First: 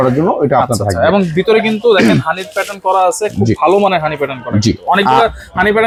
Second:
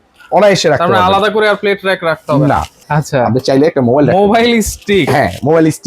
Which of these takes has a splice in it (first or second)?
second